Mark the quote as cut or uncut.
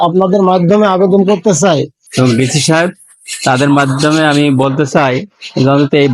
cut